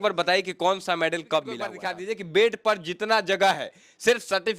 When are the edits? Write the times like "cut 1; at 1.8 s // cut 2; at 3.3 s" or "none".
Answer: cut 1; at 1.9 s